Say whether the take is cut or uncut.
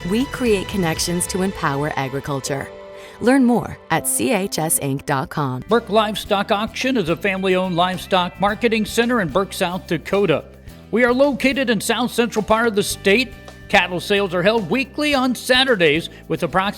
cut